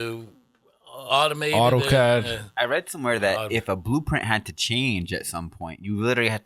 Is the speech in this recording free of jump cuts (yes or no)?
yes